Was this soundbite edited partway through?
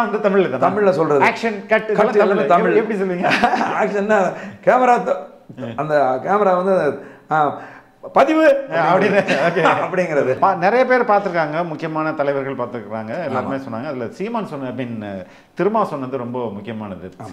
yes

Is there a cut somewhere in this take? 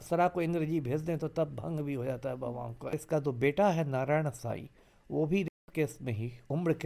yes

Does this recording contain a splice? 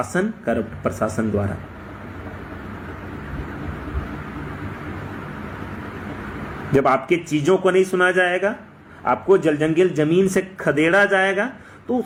no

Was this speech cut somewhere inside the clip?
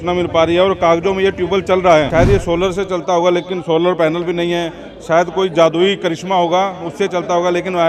yes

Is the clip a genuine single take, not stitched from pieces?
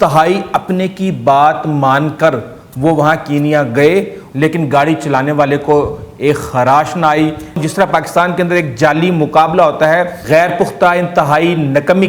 no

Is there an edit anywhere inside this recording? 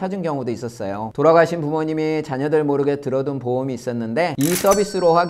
yes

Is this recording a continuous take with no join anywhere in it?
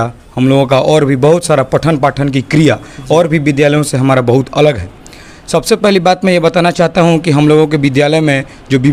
yes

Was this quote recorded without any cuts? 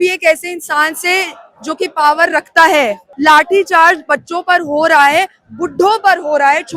no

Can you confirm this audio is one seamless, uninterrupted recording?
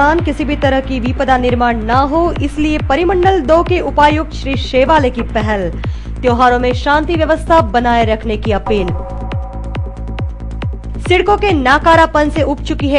no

